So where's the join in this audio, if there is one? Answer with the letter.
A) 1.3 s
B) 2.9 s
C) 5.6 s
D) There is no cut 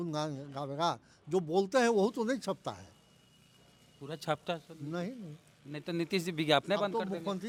D